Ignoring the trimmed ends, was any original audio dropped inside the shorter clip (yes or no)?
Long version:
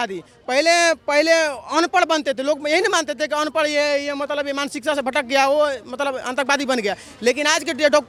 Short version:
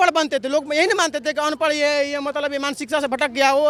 no